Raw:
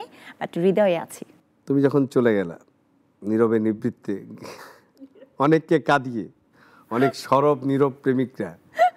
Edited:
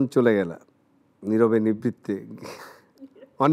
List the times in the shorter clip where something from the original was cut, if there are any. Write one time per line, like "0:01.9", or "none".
none